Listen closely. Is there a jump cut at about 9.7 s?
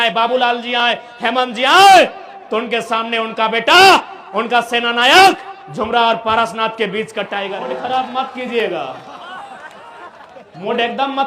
no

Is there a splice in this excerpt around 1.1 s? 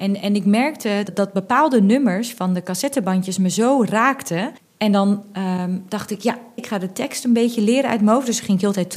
yes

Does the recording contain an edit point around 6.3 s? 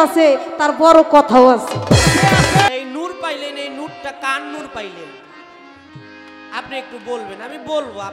no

